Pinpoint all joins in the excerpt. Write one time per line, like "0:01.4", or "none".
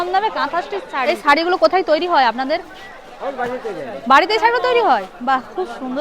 0:00.9